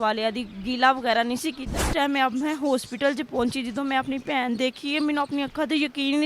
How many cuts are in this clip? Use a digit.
1